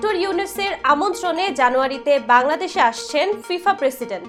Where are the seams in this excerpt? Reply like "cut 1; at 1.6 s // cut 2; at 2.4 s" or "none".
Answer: none